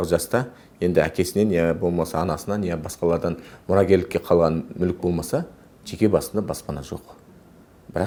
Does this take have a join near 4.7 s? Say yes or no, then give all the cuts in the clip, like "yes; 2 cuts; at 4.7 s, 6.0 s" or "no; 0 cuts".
no; 0 cuts